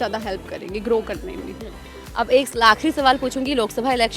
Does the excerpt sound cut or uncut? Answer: uncut